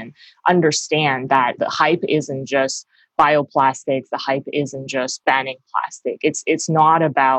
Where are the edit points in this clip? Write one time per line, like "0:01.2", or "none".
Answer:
none